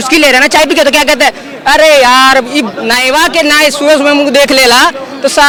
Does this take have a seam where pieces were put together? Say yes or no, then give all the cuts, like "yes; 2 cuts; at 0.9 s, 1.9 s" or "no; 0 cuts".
no; 0 cuts